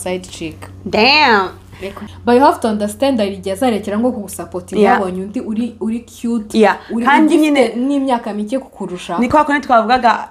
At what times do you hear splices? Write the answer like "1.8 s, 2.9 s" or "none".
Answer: 2.0 s